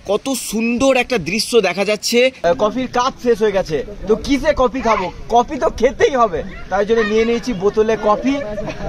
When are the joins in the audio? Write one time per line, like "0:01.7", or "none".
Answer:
0:02.4

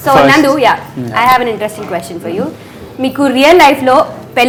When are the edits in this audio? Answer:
none

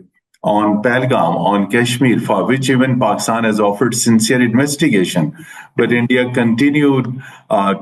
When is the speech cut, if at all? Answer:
none

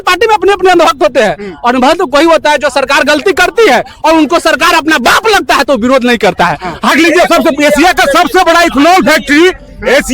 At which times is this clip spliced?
0:06.9

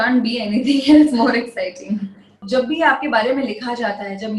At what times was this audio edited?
0:02.4

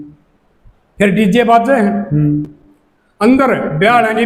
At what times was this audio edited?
none

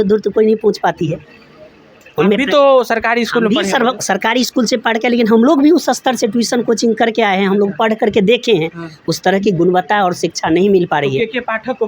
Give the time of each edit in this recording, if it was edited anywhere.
none

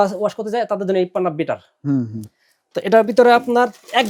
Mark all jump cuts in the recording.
none

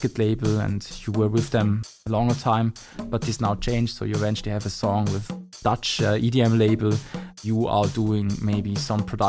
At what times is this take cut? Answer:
0:01.9
0:05.4
0:07.4

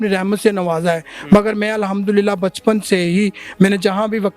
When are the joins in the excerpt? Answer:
none

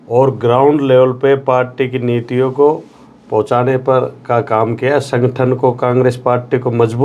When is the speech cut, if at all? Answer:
none

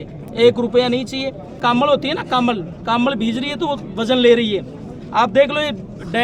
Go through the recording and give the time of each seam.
0:01.6

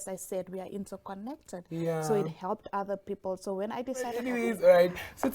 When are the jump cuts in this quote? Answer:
0:04.2

